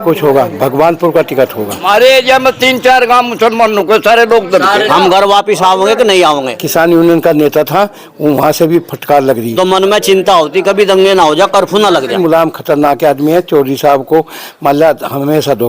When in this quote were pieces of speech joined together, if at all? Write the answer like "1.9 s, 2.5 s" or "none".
1.8 s, 4.9 s, 6.5 s, 9.5 s, 12.2 s